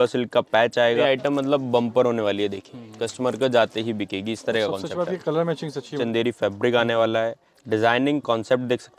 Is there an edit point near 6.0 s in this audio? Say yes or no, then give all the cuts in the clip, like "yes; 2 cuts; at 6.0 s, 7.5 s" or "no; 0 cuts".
yes; 2 cuts; at 1.0 s, 6.0 s